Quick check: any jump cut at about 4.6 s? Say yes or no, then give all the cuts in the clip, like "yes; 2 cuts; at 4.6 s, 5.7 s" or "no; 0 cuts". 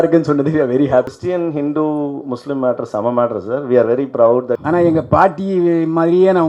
yes; 2 cuts; at 1.2 s, 4.6 s